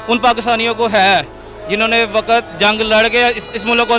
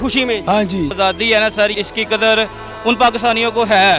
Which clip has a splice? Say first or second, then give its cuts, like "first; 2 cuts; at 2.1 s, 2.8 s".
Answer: second; 2 cuts; at 0.9 s, 1.8 s